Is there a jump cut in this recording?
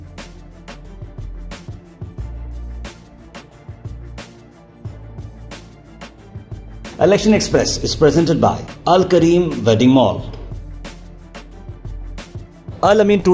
no; 0 cuts

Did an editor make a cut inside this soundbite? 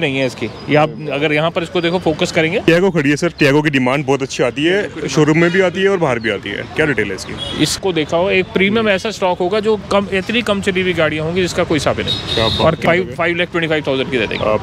yes; 3 cuts; at 2.7 s, 7.8 s, 12.8 s

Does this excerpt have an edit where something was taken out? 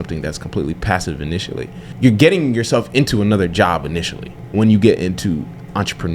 yes; 1 cut; at 4.3 s

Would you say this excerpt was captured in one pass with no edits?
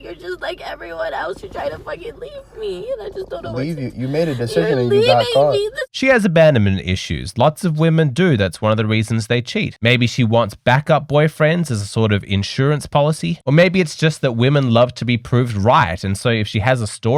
yes; 0 cuts

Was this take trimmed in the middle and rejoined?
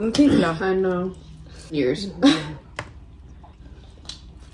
yes; 2 cuts; at 1.7 s, 3.6 s

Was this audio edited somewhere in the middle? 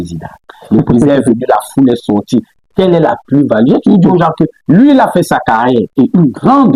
no; 0 cuts

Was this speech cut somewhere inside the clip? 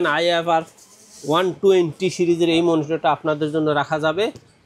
no; 0 cuts

